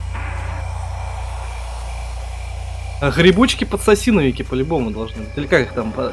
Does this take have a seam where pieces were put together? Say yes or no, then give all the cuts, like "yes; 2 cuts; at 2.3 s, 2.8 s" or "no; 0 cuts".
no; 0 cuts